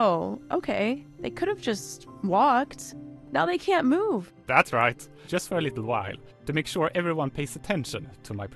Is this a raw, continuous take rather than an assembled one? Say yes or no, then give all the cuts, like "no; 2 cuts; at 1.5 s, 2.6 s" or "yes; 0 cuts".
yes; 0 cuts